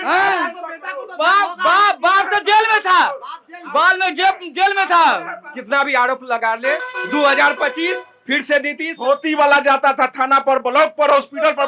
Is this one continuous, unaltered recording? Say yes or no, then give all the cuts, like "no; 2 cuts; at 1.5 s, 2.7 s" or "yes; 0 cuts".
no; 2 cuts; at 5.5 s, 8.9 s